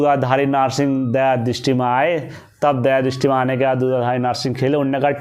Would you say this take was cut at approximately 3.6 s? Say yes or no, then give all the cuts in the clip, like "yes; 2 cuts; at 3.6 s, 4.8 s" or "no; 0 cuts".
yes; 1 cut; at 3.6 s